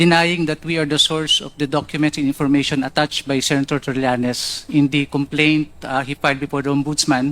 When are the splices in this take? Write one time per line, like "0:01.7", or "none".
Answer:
0:05.1